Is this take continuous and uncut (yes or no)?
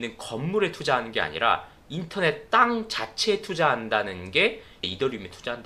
yes